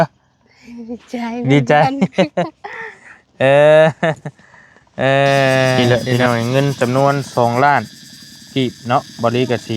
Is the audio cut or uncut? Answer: cut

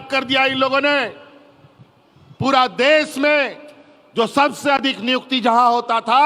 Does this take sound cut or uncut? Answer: uncut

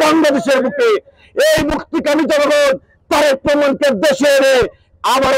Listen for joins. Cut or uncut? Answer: uncut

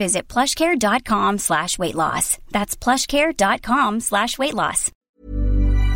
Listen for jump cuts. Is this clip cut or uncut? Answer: cut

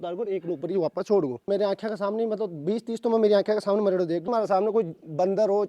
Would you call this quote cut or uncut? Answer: cut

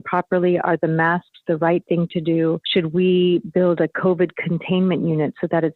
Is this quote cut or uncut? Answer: cut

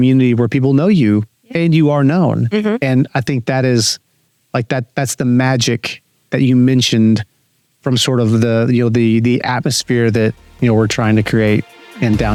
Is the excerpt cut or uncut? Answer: uncut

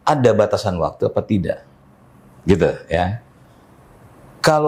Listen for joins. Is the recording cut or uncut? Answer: uncut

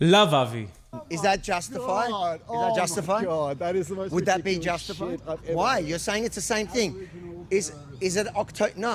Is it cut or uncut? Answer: uncut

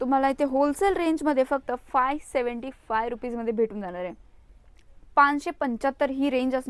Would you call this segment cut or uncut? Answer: uncut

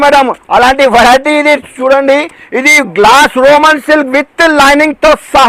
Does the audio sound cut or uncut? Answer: uncut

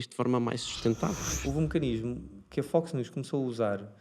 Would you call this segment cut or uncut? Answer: cut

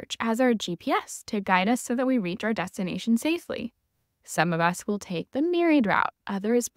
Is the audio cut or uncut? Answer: uncut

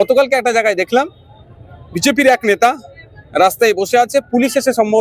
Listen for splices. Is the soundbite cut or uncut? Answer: uncut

